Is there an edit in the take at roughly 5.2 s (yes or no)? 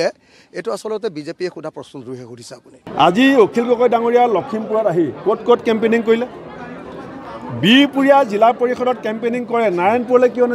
no